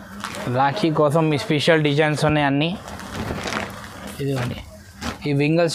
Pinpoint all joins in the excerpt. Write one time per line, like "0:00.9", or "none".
none

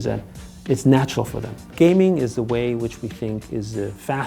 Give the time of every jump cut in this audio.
0:01.7

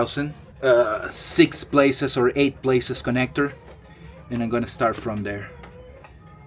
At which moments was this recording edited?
none

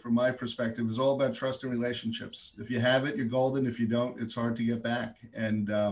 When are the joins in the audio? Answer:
none

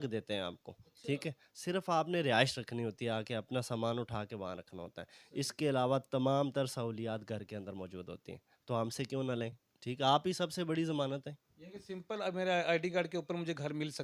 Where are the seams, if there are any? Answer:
0:09.7

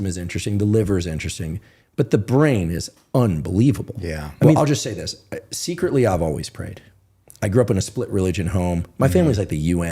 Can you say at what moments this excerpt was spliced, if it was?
0:04.6

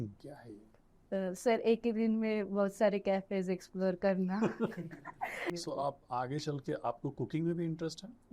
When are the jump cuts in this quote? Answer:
0:05.5

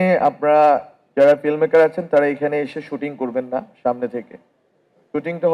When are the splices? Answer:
none

